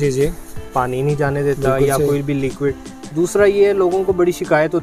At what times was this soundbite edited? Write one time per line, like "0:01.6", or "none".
none